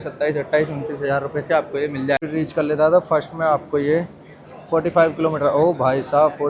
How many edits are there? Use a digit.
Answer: 1